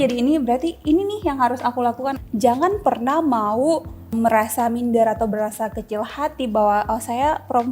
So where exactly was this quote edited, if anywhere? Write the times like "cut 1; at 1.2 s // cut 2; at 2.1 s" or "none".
cut 1; at 2.2 s // cut 2; at 4.1 s